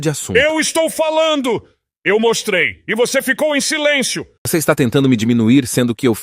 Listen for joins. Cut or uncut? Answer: cut